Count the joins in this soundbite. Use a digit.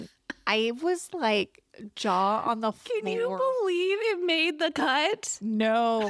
0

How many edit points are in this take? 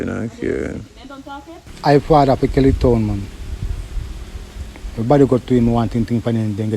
1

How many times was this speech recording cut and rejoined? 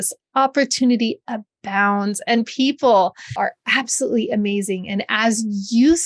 1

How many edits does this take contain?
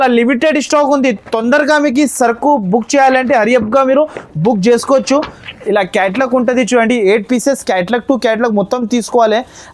0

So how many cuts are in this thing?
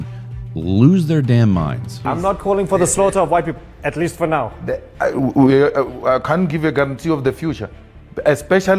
1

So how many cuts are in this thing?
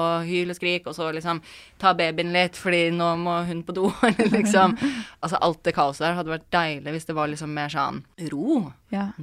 1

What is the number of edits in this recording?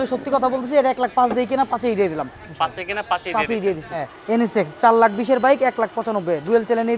1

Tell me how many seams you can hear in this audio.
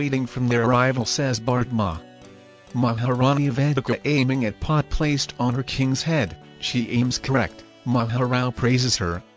0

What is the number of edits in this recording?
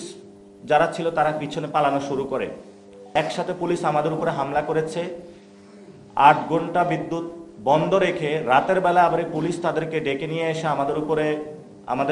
1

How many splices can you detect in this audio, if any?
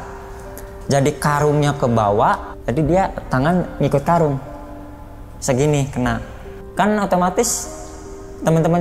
2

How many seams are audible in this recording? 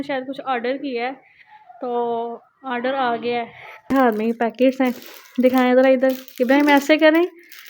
1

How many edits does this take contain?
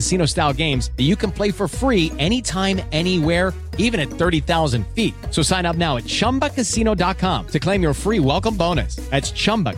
0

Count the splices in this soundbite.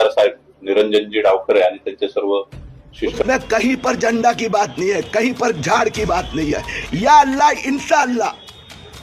1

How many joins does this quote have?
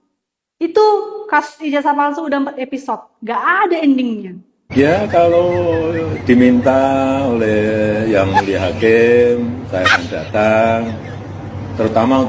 1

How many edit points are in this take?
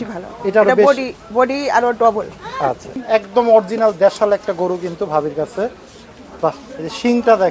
1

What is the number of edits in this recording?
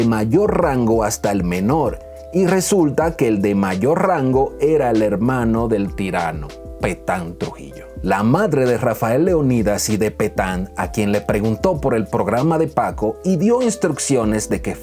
1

